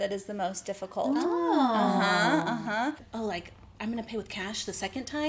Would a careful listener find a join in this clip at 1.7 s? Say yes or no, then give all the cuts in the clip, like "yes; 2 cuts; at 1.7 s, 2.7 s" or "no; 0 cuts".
no; 1 cut; at 3.1 s